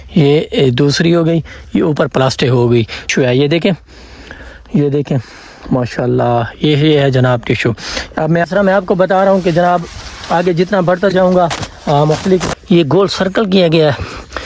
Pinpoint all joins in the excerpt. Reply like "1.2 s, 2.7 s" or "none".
3.1 s, 8.5 s, 12.5 s